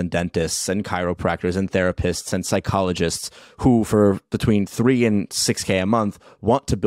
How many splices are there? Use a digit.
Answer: 0